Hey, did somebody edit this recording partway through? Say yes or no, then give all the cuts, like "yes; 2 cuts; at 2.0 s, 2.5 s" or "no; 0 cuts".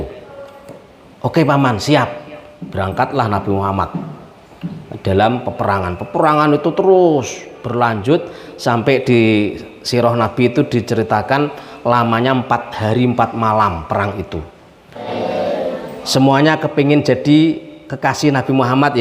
yes; 1 cut; at 15.0 s